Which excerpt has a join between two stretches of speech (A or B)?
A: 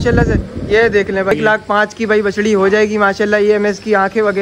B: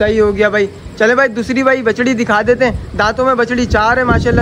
A